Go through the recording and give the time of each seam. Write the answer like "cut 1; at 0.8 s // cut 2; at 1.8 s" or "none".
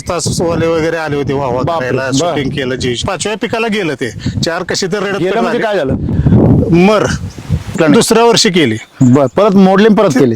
cut 1; at 3.0 s // cut 2; at 7.8 s